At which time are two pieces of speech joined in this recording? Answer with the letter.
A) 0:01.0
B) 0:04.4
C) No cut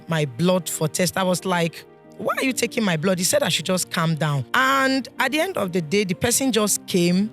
B